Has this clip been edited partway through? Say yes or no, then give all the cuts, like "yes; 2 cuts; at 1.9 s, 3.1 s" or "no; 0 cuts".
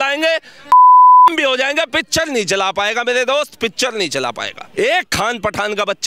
yes; 1 cut; at 4.6 s